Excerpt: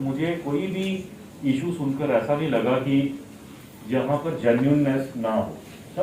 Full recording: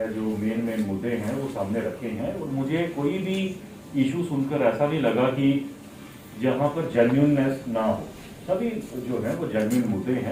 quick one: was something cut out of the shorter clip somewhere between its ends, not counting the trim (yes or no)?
no